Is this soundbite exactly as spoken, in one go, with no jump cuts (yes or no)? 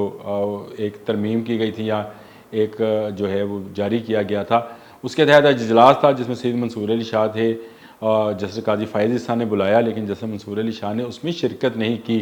yes